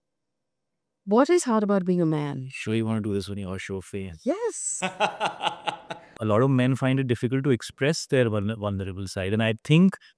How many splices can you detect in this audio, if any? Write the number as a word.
one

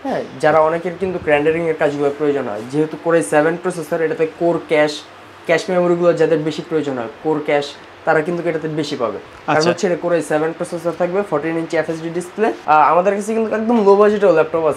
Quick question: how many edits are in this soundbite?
one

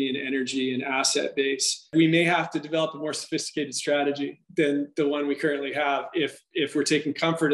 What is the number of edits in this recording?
one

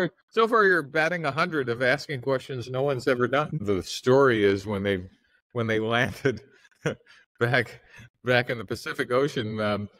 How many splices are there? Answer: one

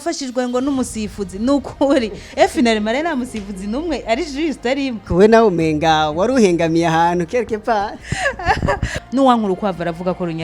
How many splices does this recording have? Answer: one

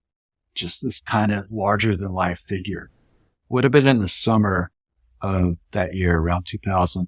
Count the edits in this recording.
one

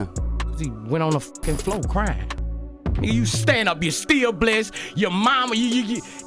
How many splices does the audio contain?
one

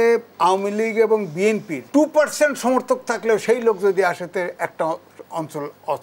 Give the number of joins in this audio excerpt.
one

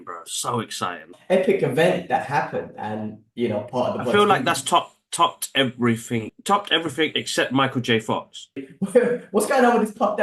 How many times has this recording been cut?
three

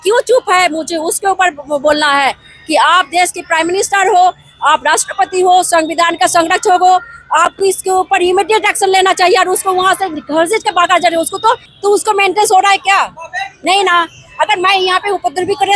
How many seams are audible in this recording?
one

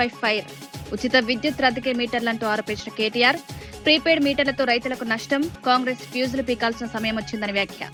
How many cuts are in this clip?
zero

